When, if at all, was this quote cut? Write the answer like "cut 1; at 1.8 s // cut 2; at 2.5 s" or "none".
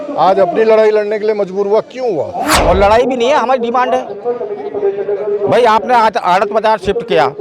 cut 1; at 2.5 s